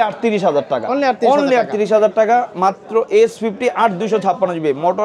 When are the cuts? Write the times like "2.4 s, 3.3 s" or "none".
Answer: none